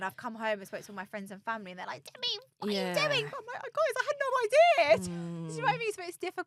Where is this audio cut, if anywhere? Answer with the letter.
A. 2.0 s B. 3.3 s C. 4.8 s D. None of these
D